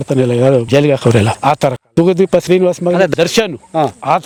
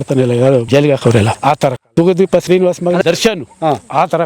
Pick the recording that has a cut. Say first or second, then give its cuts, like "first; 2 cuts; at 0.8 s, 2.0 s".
second; 1 cut; at 3.0 s